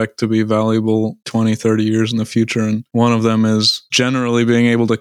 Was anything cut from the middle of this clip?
yes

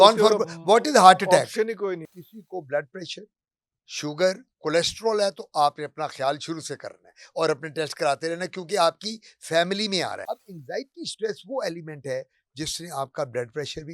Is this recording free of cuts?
no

